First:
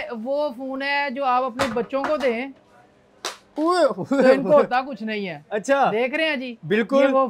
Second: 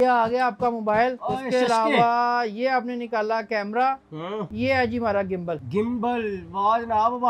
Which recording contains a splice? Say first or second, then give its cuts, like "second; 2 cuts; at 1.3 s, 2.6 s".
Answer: second; 3 cuts; at 1.2 s, 4.5 s, 5.6 s